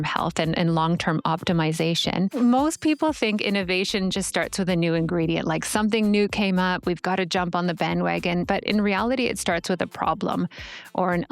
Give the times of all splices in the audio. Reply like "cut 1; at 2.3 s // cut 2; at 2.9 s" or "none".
cut 1; at 2.3 s